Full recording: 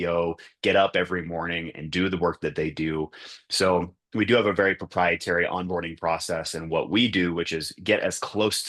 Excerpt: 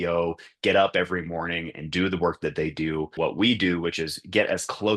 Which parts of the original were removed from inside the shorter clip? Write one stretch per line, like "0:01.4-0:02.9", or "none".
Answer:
0:03.1-0:06.6

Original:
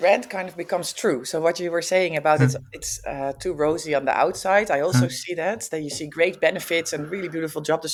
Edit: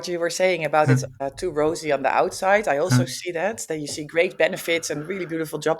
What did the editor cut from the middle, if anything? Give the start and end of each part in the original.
0:02.7-0:03.2

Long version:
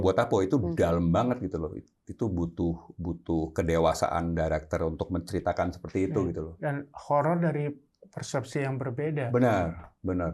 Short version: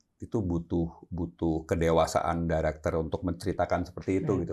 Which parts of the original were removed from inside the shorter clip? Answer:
none

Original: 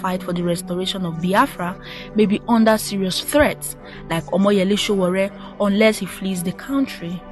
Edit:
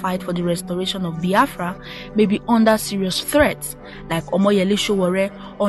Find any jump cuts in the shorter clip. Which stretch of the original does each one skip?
none

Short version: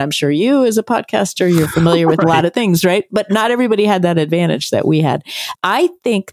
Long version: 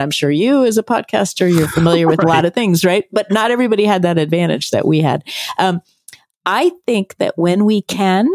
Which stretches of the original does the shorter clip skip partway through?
0:05.4-0:06.2

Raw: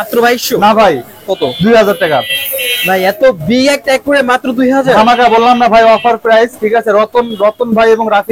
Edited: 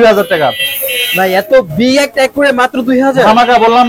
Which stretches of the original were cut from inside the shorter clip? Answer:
none

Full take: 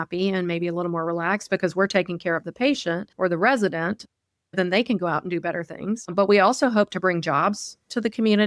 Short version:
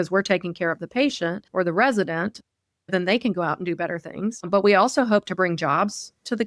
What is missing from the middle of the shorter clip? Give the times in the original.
none

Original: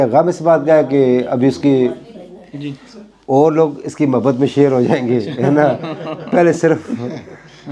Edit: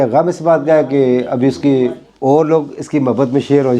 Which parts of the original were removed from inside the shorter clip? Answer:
0:02.1-0:03.1

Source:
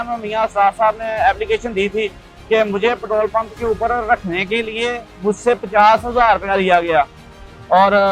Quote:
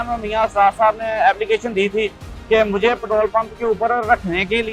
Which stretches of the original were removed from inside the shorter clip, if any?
none

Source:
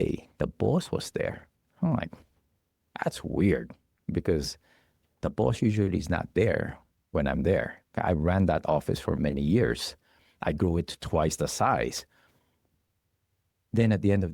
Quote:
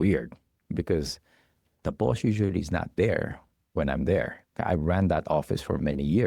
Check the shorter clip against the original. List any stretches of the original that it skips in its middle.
none

